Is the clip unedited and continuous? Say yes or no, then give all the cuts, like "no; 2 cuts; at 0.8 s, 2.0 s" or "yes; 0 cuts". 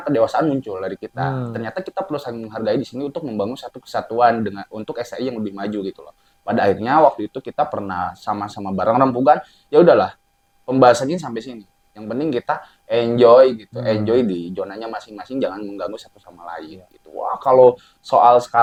yes; 0 cuts